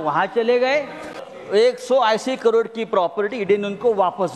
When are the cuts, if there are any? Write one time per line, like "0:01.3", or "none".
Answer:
0:01.3